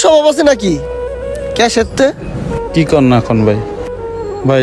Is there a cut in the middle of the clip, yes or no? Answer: no